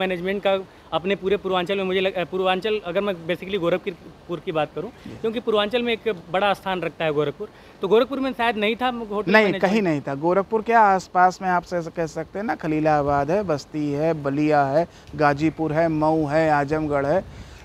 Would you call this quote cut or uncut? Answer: uncut